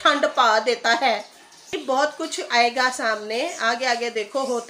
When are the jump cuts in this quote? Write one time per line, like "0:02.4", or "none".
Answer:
0:01.8